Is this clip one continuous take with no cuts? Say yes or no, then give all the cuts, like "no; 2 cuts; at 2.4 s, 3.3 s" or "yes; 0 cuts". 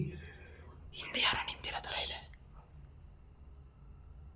yes; 0 cuts